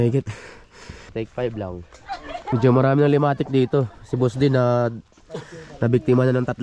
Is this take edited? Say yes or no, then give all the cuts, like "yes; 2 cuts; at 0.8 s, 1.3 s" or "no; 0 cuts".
yes; 2 cuts; at 1.1 s, 2.3 s